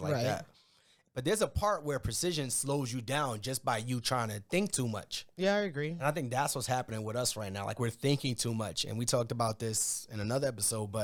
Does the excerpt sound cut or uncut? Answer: uncut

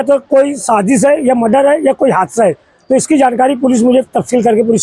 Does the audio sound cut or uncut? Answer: uncut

